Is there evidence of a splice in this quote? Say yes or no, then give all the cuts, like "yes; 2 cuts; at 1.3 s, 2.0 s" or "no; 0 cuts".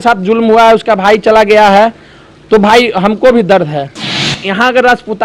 yes; 1 cut; at 4.3 s